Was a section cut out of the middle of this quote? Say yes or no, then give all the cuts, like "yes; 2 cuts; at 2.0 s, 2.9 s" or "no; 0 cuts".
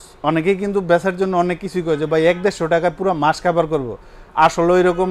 no; 0 cuts